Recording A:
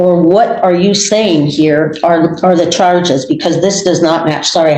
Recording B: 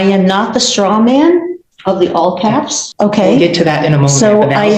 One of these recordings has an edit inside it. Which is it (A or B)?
B